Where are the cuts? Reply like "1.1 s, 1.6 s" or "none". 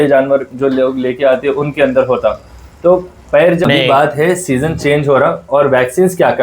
3.7 s